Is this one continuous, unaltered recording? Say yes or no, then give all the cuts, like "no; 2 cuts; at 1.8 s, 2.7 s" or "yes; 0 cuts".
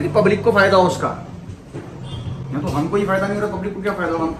yes; 0 cuts